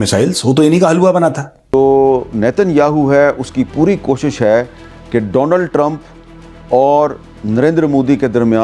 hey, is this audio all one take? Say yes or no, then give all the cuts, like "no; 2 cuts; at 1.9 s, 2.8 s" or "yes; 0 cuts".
no; 1 cut; at 1.7 s